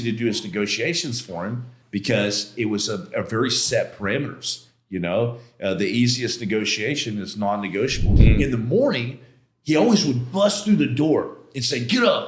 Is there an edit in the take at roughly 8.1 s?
yes; 2 cuts; at 1.7 s, 8.1 s

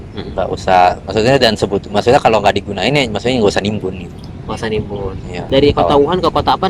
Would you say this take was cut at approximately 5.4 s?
yes; 1 cut; at 5.4 s

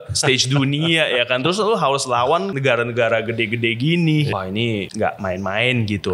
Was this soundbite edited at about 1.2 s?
no; 2 cuts; at 2.5 s, 4.4 s

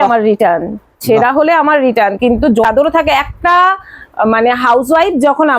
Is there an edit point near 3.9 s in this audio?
no; 1 cut; at 2.6 s

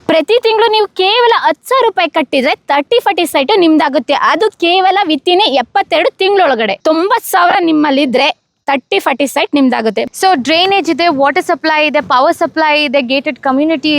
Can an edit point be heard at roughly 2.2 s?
no; 2 cuts; at 6.7 s, 10.1 s

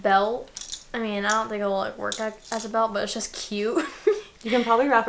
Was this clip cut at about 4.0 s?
no; 0 cuts

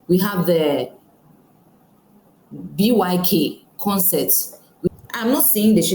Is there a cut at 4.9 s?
yes; 1 cut; at 4.9 s

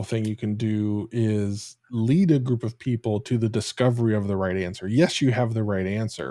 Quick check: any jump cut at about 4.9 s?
no; 0 cuts

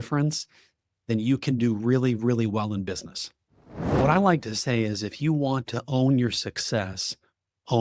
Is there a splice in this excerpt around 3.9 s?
yes; 1 cut; at 3.9 s

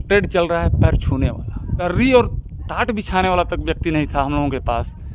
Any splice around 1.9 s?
yes; 1 cut; at 1.9 s

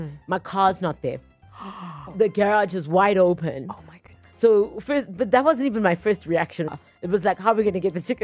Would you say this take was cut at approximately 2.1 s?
yes; 2 cuts; at 2.1 s, 6.7 s

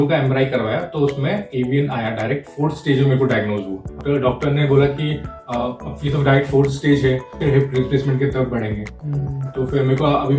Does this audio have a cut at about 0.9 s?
no; 2 cuts; at 4.0 s, 7.4 s

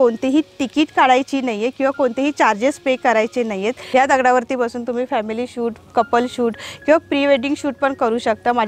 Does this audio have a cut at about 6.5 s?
no; 1 cut; at 3.8 s

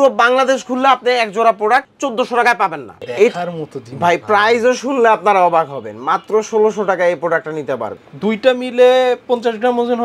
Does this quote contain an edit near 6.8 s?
no; 1 cut; at 3.1 s

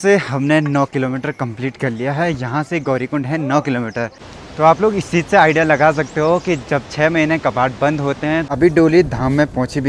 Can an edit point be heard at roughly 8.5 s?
yes; 2 cuts; at 4.2 s, 8.5 s

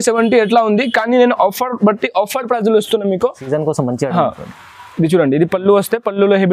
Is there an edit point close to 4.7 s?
no; 1 cut; at 3.4 s

